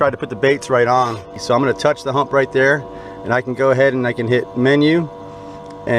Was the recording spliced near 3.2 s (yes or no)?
no